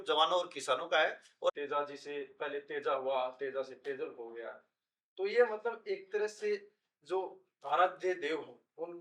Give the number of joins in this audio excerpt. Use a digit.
1